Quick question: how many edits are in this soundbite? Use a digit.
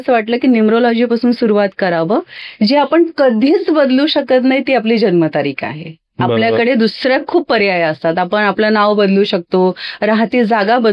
1